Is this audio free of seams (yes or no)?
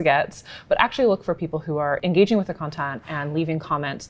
no